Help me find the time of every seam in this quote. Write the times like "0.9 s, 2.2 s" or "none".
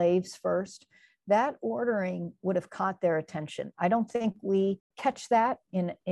4.9 s